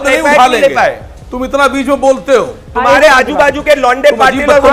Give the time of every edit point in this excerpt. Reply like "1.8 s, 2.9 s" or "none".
none